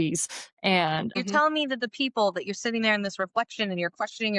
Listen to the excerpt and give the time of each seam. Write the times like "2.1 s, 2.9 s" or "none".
1.2 s